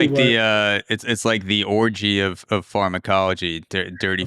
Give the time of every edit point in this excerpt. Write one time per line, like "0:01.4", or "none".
none